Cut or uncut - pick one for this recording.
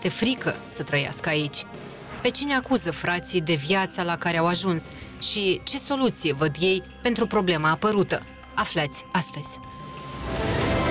cut